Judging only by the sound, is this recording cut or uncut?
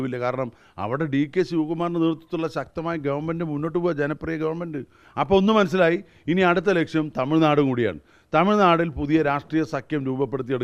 cut